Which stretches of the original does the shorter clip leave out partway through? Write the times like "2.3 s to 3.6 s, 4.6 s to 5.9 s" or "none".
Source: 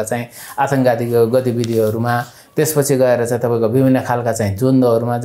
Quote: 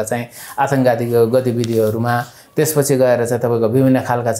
none